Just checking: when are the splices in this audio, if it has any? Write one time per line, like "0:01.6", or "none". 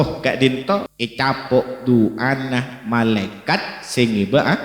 0:01.0